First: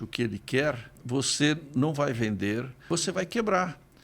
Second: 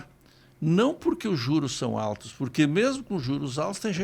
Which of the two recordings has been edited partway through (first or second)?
first